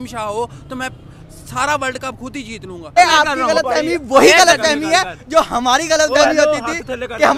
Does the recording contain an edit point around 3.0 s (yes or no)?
yes